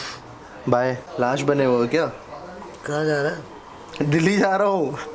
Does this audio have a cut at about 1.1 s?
yes; 2 cuts; at 1.1 s, 3.6 s

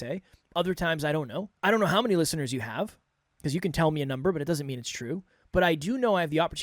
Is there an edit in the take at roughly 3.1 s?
no; 1 cut; at 1.5 s

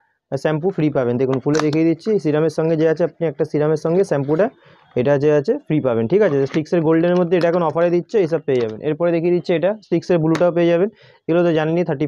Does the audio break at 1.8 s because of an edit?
no; 0 cuts

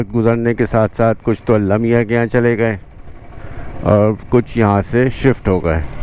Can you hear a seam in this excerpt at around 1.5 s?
no; 0 cuts

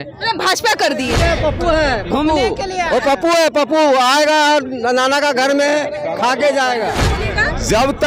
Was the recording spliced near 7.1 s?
yes; 2 cuts; at 1.1 s, 7.1 s

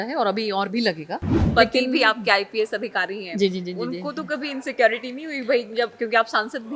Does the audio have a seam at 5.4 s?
no; 1 cut; at 1.4 s

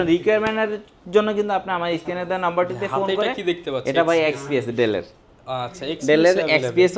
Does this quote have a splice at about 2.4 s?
no; 0 cuts

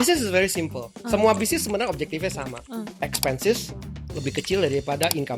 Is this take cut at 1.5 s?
no; 1 cut; at 2.9 s

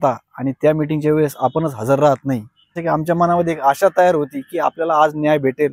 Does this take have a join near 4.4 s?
no; 1 cut; at 2.8 s

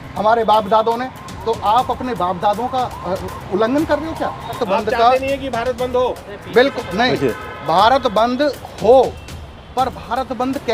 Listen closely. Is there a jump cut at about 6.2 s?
no; 1 cut; at 4.6 s

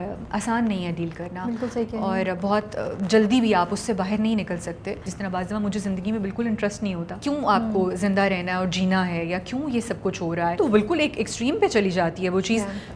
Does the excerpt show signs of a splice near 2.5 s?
no; 3 cuts; at 5.1 s, 7.1 s, 10.6 s

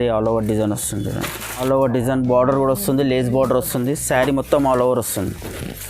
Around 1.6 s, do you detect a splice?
yes; 1 cut; at 1.6 s

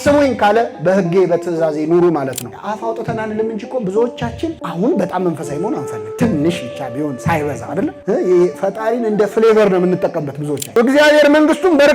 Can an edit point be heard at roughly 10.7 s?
yes; 2 cuts; at 2.4 s, 10.7 s

